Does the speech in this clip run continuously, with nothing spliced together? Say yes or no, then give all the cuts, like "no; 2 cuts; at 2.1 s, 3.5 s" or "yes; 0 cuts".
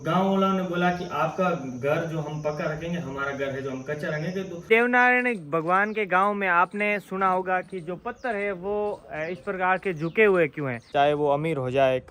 no; 2 cuts; at 4.7 s, 10.8 s